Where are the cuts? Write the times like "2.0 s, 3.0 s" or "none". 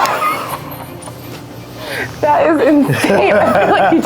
2.1 s